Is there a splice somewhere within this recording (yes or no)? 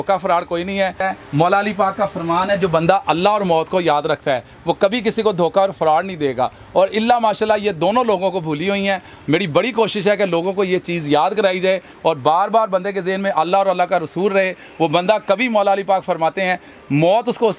yes